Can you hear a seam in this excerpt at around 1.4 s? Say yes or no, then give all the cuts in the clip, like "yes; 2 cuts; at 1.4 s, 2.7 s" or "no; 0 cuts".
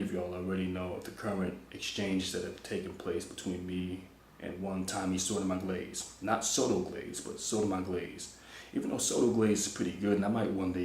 no; 1 cut; at 4.9 s